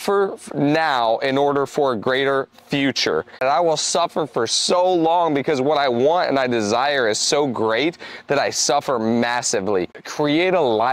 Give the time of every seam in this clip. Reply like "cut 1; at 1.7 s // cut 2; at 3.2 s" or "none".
cut 1; at 3.4 s // cut 2; at 10.0 s